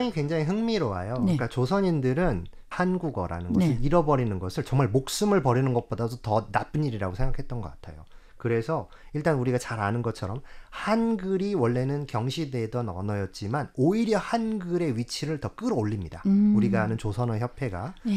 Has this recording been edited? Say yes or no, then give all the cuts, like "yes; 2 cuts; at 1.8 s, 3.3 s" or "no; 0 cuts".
yes; 1 cut; at 2.7 s